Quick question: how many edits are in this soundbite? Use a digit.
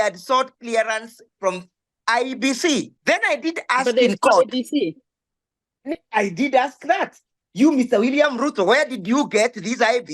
1